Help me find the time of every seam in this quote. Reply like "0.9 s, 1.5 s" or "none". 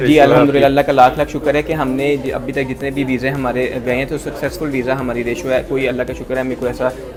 none